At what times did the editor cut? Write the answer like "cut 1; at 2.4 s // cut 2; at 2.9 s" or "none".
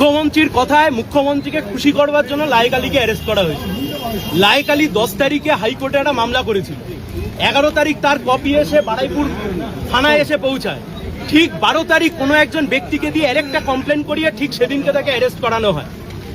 none